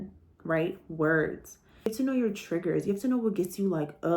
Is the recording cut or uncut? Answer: cut